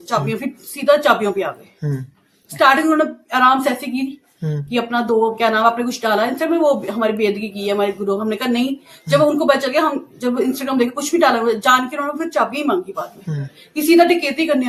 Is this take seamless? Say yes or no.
yes